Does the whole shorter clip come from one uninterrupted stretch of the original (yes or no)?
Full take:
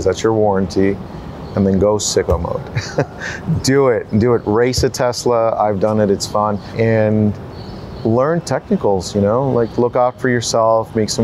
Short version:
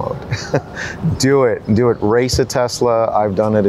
yes